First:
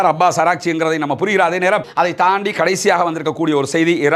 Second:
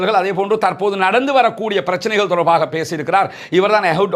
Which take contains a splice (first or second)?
first